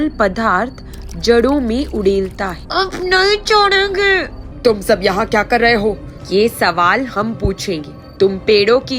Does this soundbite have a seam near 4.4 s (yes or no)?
yes